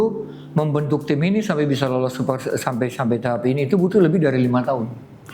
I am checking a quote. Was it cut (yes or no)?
no